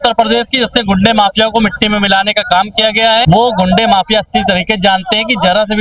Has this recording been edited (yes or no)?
yes